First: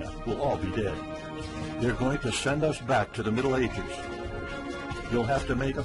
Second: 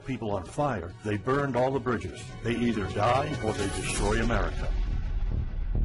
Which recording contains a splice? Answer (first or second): second